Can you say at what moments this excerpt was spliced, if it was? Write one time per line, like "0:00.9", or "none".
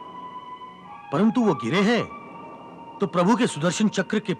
0:00.9